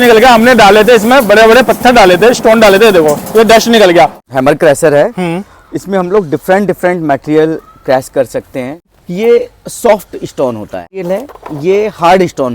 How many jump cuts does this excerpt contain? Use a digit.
3